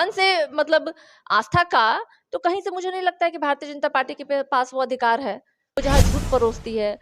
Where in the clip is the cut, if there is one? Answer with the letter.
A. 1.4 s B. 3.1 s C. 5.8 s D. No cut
C